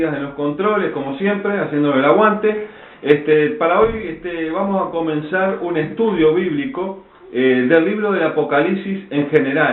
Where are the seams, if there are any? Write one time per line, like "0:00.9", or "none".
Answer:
0:01.9